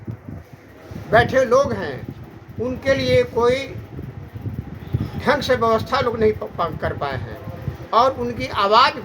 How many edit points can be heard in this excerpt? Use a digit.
0